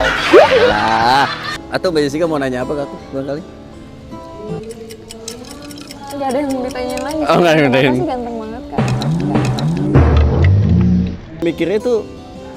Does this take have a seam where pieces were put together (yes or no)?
yes